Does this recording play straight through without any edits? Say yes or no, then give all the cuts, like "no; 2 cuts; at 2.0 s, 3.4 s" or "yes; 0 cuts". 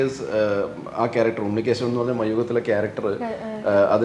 yes; 0 cuts